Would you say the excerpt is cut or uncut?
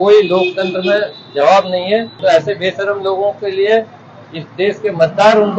cut